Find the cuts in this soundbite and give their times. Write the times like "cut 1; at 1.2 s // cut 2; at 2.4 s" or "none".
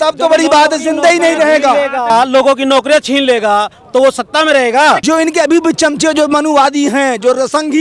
cut 1; at 2.1 s // cut 2; at 5.0 s

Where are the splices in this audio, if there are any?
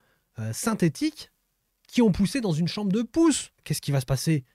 cut 1; at 3.6 s

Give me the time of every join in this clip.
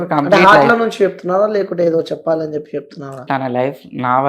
cut 1; at 3.2 s

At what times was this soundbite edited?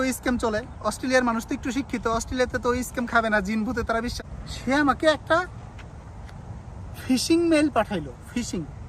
cut 1; at 4.1 s

